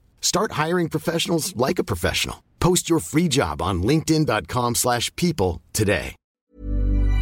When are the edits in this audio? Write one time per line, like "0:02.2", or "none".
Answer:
0:06.2